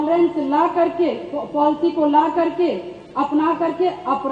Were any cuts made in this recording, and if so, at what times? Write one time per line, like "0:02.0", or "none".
none